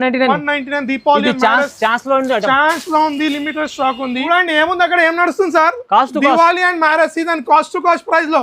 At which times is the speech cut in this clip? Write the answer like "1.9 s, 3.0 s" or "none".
4.3 s